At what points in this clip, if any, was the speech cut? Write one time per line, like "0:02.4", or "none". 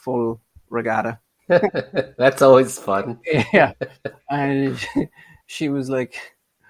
0:01.3